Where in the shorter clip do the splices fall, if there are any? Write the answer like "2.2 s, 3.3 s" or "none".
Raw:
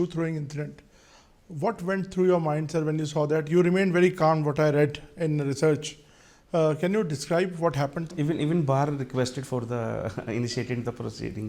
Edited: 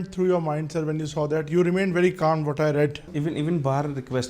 3.0 s